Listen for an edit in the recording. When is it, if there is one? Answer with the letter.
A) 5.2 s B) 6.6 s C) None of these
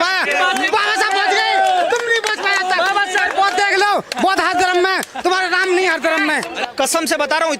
B